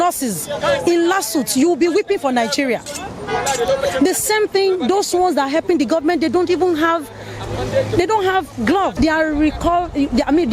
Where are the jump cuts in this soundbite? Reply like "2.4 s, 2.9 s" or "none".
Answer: 8.9 s